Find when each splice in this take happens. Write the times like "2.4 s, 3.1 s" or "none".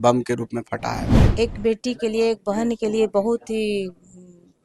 1.2 s

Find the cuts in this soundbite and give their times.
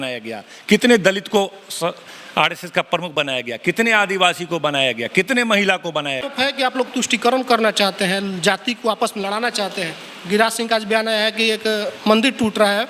6.3 s

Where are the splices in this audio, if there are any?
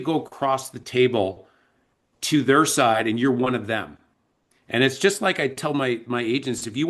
none

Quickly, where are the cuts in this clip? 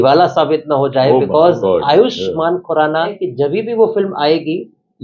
3.0 s

